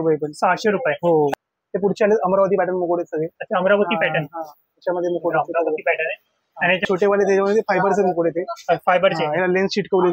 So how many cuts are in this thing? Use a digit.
2